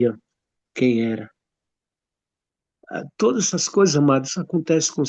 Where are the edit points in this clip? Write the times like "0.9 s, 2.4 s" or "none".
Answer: none

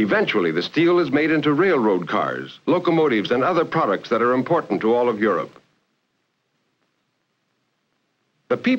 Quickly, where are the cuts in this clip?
none

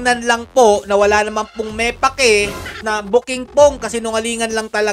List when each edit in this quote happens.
2.9 s

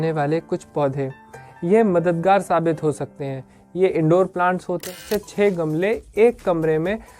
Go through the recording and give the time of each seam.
4.9 s

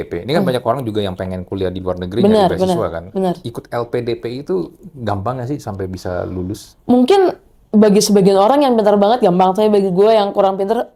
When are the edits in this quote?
none

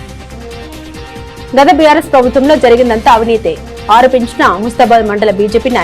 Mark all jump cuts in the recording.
1.1 s

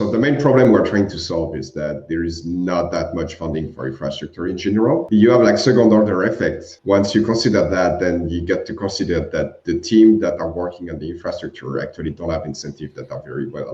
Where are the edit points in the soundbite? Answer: 5.0 s, 6.7 s

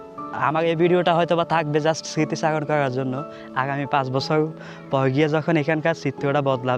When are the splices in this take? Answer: none

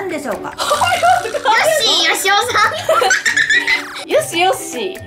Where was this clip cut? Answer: 4.0 s

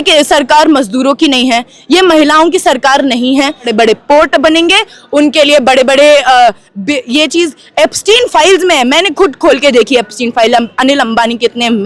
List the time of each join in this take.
3.7 s

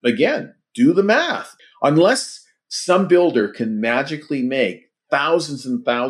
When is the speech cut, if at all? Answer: 1.5 s

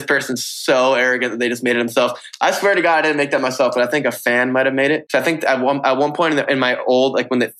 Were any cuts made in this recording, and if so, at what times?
5.0 s

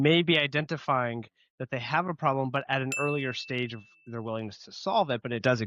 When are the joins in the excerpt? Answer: none

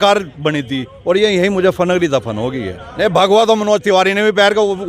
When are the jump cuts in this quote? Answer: 2.9 s

